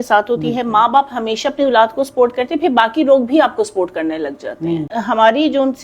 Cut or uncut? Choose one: cut